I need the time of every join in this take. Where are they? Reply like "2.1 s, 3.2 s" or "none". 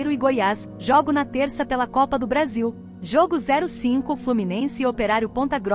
2.9 s